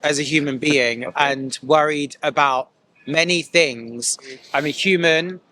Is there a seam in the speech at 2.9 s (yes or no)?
no